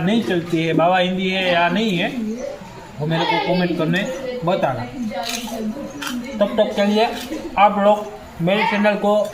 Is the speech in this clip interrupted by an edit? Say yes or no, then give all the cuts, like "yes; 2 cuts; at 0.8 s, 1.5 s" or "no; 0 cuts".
no; 0 cuts